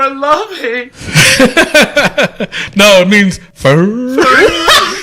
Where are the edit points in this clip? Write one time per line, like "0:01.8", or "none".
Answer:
0:03.5